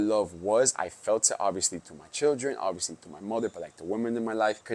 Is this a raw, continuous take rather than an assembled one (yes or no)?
yes